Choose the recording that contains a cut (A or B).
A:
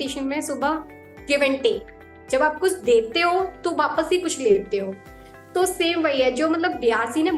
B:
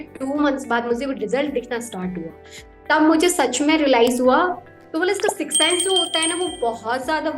B